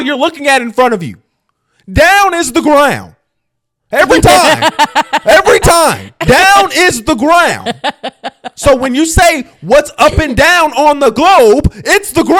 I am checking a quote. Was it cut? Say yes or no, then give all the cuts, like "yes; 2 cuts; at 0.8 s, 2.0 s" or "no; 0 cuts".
no; 0 cuts